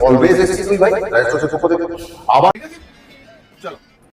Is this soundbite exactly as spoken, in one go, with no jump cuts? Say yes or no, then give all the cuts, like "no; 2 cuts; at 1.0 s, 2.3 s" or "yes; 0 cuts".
no; 1 cut; at 2.5 s